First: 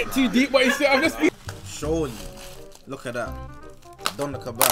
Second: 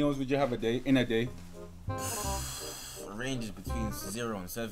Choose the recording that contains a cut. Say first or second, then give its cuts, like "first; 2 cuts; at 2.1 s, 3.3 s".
first; 2 cuts; at 1.3 s, 3.9 s